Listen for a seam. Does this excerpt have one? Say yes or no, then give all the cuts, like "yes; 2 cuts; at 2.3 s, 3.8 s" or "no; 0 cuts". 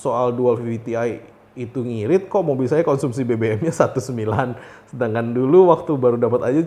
no; 0 cuts